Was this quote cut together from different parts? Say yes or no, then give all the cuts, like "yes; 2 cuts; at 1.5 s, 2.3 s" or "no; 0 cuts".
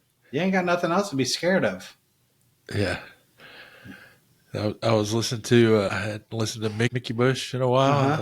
no; 0 cuts